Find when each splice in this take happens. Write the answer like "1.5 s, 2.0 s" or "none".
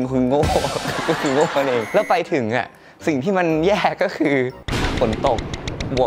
none

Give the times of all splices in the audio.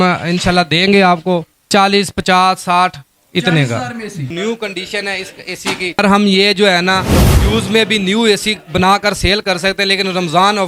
1.7 s, 4.3 s, 5.9 s

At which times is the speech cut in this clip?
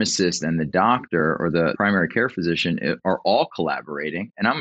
1.7 s

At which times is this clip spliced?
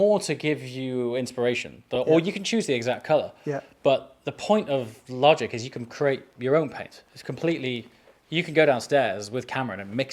none

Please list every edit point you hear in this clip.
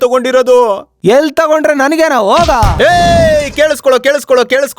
2.8 s

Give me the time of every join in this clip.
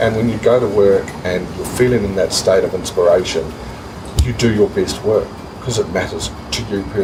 none

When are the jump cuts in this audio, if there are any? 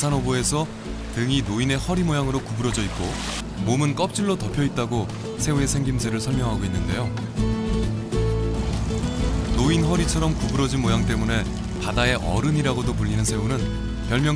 4.5 s

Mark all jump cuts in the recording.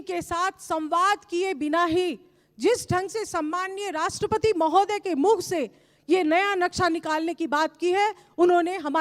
none

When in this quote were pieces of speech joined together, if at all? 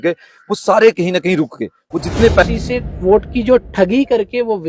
2.4 s

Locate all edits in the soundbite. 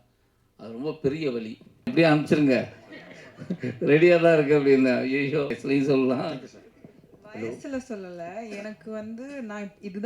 1.9 s, 5.6 s

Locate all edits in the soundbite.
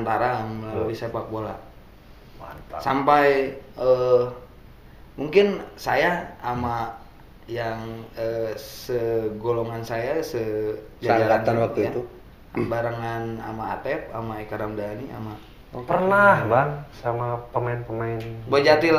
none

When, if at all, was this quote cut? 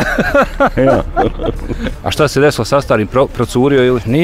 1.8 s

